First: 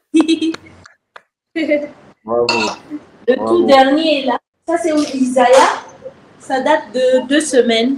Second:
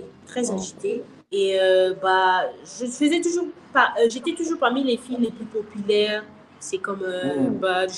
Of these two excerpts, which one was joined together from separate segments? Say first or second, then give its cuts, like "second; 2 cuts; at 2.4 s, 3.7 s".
first; 1 cut; at 4.5 s